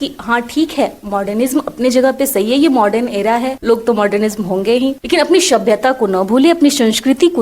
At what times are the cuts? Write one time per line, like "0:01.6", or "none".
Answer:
0:03.5
0:05.0